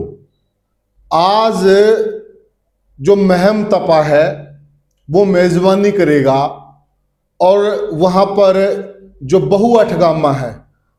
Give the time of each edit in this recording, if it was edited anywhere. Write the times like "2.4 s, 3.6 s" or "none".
none